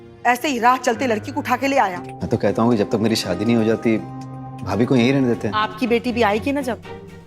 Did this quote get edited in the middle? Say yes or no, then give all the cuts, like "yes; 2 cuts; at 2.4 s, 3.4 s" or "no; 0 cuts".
yes; 2 cuts; at 2.0 s, 5.5 s